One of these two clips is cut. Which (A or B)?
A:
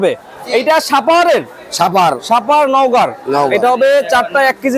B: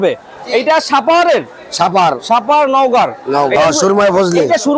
B